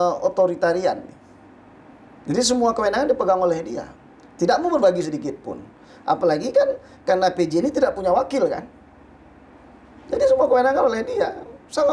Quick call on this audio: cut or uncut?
uncut